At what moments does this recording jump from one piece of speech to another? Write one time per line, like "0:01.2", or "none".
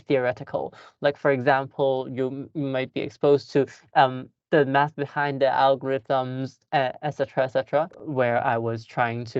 0:08.0